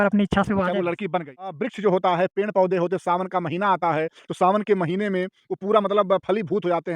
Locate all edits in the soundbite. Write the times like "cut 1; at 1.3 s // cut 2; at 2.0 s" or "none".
cut 1; at 1.7 s